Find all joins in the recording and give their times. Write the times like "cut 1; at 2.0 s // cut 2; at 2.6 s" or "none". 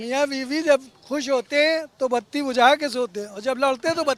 none